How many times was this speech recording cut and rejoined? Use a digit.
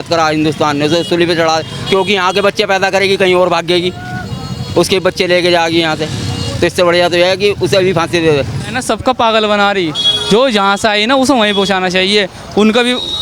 1